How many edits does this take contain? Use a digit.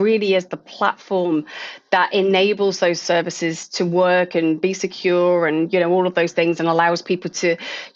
0